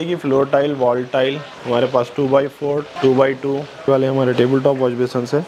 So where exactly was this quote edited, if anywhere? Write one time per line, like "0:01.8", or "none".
0:02.9
0:03.7

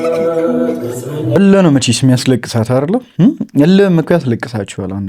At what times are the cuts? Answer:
0:01.4

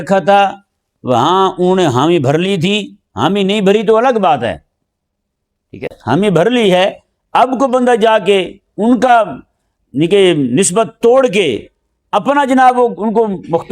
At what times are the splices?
0:06.0

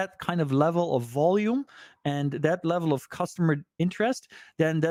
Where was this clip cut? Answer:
none

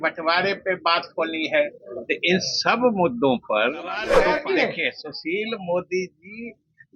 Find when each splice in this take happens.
0:04.1

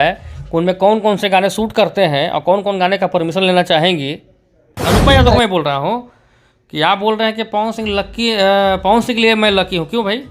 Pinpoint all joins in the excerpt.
0:04.7

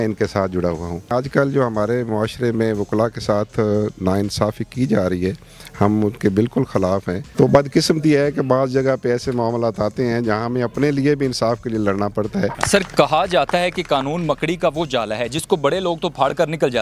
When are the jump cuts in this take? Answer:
0:01.1
0:07.2
0:12.6

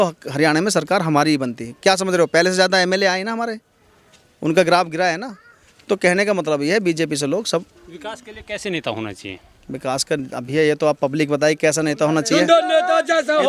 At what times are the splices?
none

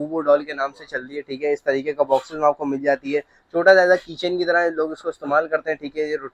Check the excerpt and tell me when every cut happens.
none

